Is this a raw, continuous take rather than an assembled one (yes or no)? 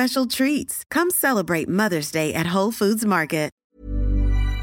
no